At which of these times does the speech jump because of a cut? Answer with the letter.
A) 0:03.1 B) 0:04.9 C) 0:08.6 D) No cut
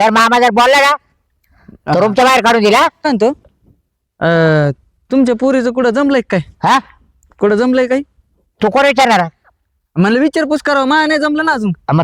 A